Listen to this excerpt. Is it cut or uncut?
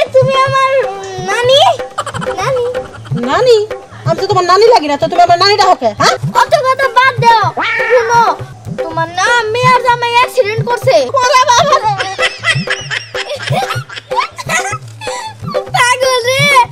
cut